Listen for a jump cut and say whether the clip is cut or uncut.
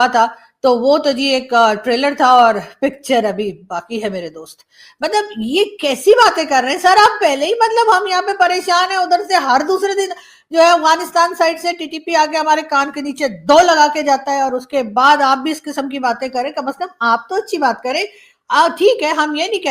uncut